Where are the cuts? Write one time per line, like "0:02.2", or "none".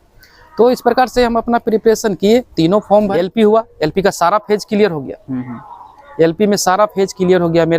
0:03.1